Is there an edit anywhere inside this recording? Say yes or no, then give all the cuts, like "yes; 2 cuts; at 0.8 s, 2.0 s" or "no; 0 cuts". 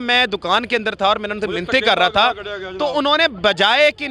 no; 0 cuts